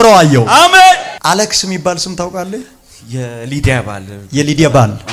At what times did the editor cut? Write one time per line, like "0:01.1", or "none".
0:01.1